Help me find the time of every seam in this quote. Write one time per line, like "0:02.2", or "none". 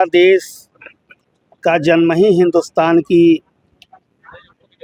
none

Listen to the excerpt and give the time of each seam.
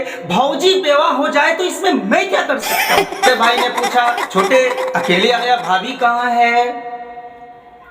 0:03.3

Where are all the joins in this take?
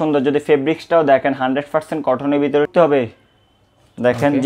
0:02.7

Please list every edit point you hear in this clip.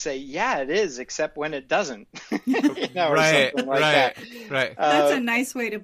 none

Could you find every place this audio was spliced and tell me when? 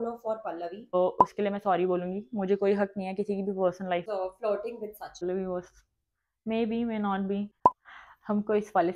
0:00.9
0:04.1
0:05.2
0:07.6

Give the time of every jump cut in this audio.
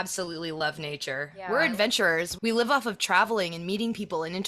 0:01.3
0:02.3

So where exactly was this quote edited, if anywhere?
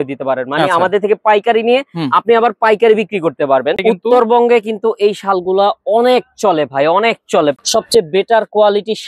0:03.8
0:07.6

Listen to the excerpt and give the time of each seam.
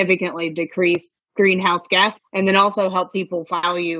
0:02.1

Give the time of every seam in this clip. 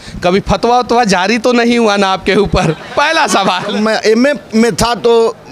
0:03.7

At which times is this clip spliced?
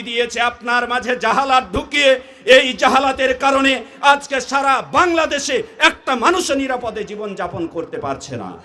none

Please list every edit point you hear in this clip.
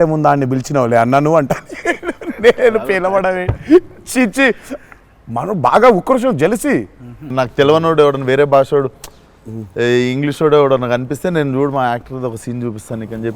0:07.3

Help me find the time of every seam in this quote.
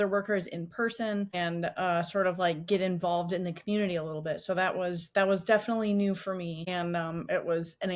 0:01.3
0:06.7

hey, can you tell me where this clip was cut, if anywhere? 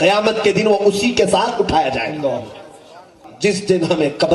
0:03.0

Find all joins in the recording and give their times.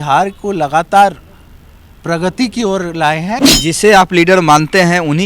0:03.4

